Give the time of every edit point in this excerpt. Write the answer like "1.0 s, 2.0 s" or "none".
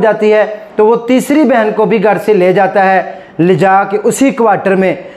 none